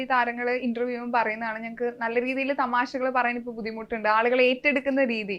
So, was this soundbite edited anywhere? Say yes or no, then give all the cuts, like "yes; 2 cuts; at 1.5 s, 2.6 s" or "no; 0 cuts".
no; 0 cuts